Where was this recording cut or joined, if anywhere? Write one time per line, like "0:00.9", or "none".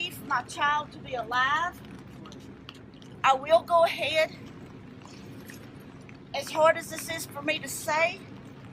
none